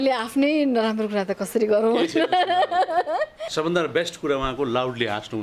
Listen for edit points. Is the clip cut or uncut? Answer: cut